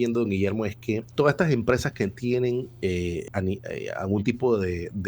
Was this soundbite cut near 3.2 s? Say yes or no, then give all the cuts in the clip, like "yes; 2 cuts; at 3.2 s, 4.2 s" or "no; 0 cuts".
yes; 2 cuts; at 1.1 s, 3.2 s